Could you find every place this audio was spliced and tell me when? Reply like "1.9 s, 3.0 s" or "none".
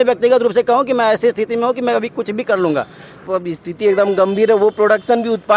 3.2 s